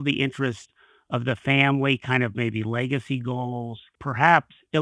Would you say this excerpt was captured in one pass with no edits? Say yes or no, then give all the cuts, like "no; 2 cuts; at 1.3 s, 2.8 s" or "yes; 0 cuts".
no; 1 cut; at 3.9 s